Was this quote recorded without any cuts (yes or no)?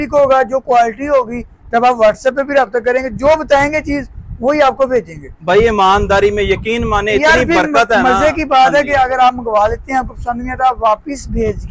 yes